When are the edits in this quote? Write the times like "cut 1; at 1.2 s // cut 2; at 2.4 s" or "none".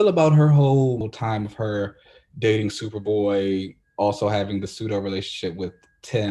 cut 1; at 1.1 s